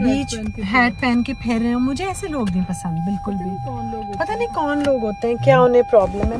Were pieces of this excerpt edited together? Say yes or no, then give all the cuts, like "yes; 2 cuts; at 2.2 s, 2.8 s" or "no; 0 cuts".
no; 0 cuts